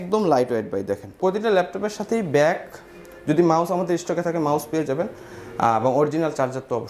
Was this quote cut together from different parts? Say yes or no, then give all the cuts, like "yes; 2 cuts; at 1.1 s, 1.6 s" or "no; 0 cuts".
yes; 1 cut; at 1.1 s